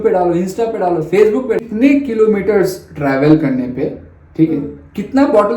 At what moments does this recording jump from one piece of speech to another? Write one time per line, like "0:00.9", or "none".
0:01.6